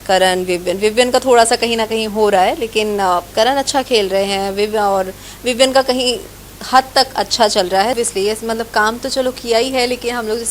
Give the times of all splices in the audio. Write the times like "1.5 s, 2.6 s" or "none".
8.0 s